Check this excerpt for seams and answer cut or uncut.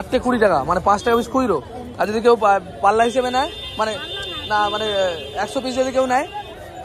uncut